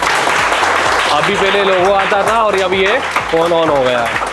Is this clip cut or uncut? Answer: uncut